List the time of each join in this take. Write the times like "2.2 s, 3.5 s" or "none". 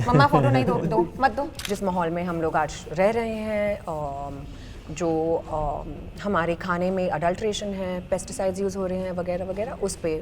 1.7 s